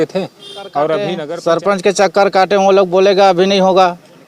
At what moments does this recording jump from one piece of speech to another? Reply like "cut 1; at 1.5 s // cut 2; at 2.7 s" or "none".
cut 1; at 1.2 s